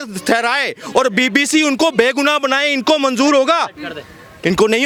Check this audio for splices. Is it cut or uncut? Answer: uncut